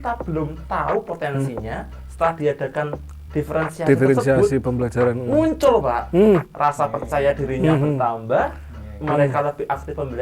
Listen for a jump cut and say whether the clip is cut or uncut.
uncut